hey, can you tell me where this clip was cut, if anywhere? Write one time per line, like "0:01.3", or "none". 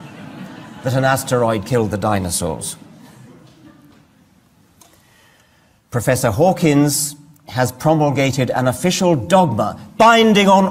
none